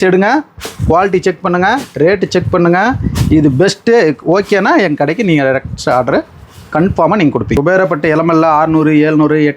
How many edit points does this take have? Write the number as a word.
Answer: one